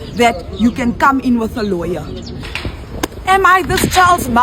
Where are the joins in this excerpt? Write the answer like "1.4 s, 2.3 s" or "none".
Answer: 2.4 s